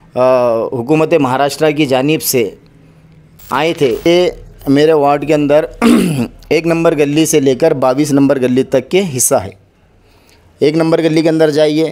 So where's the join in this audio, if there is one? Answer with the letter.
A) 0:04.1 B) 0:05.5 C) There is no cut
A